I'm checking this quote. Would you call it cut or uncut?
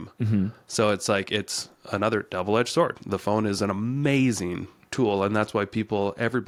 uncut